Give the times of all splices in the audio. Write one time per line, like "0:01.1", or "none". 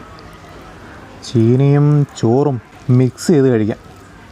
0:02.7